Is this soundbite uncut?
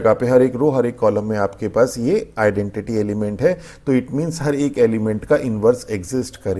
yes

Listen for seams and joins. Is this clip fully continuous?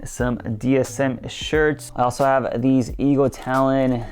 no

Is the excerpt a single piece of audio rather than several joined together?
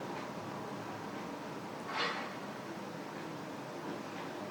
yes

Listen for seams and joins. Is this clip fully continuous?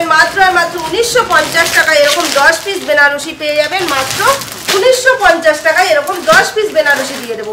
yes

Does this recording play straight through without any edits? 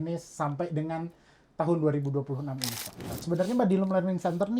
no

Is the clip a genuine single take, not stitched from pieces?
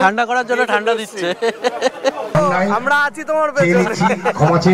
no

